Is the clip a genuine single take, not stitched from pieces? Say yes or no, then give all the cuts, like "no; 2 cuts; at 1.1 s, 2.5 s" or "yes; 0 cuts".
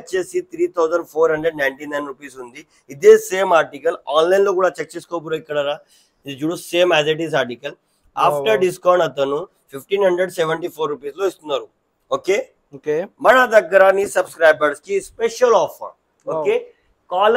yes; 0 cuts